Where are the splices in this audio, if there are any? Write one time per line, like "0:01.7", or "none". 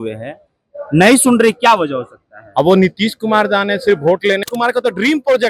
0:04.5